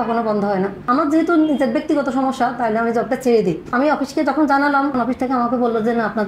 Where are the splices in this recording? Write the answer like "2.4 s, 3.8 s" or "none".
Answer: 0.8 s, 3.7 s, 4.9 s